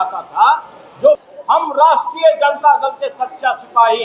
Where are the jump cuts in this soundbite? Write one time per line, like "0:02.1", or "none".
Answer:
0:01.2